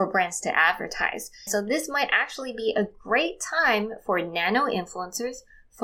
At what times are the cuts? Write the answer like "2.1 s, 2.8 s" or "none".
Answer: 1.5 s